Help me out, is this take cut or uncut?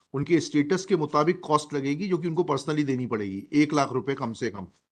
uncut